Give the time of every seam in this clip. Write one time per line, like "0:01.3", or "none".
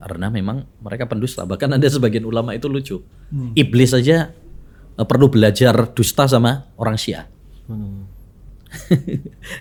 none